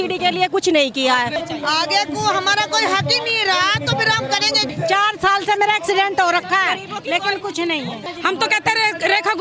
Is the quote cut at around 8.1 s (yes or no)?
yes